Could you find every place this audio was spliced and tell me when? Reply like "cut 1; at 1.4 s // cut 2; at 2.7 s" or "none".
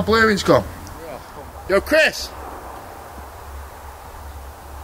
cut 1; at 1.4 s